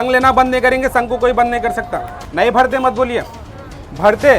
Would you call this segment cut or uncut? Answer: cut